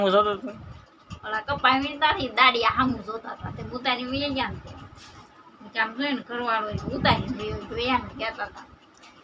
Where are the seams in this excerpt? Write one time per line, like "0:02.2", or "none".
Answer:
none

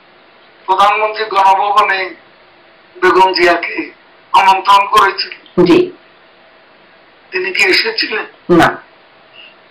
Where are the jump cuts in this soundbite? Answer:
none

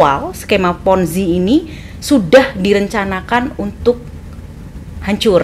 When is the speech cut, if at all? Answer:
none

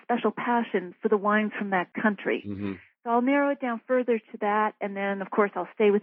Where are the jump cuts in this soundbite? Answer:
none

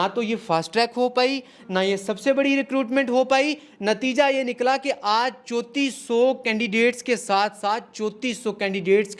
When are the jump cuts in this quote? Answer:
none

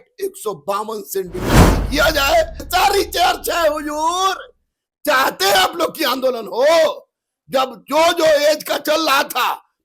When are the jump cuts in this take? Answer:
0:02.7

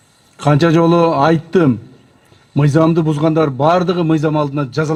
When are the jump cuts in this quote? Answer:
none

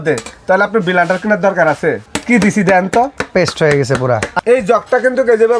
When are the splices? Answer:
0:02.0
0:04.3

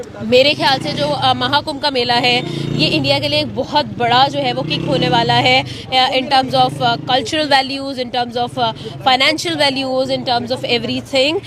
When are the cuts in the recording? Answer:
none

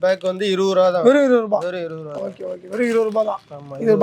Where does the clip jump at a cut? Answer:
none

